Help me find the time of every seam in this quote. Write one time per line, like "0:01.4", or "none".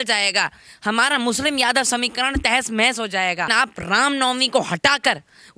0:03.5